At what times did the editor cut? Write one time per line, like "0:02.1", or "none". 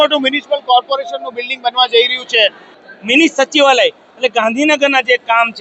0:02.7